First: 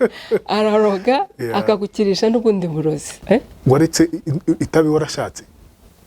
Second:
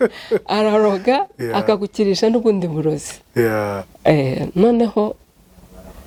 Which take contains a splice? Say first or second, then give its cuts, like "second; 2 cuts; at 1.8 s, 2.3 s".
first; 1 cut; at 3.1 s